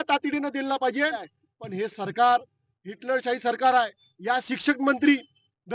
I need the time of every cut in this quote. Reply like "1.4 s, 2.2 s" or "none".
1.3 s, 4.1 s